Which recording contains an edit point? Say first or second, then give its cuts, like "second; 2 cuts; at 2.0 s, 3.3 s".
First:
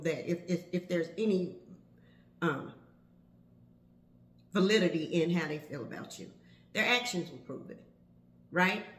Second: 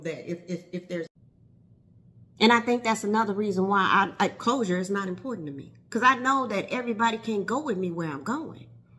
second; 1 cut; at 1.1 s